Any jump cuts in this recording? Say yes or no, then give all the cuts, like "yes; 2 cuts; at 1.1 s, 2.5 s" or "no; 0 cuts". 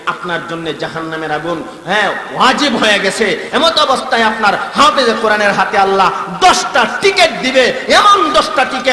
no; 0 cuts